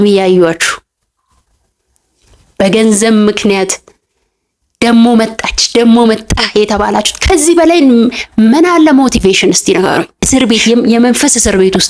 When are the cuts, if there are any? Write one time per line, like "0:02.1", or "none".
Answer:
0:10.3